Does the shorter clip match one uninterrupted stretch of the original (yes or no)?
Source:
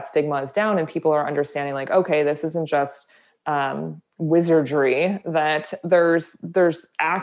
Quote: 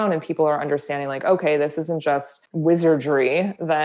no